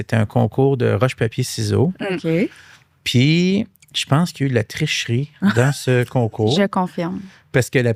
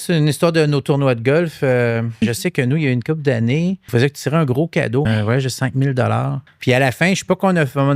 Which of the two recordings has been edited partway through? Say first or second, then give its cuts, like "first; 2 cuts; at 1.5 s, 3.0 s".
second; 4 cuts; at 2.1 s, 3.8 s, 5.1 s, 6.4 s